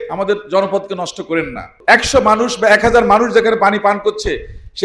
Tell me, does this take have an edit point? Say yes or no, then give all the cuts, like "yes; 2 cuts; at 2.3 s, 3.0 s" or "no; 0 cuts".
yes; 1 cut; at 1.8 s